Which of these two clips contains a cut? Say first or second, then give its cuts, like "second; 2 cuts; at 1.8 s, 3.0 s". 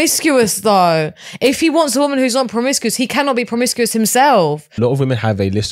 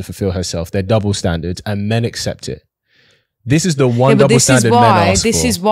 first; 1 cut; at 4.7 s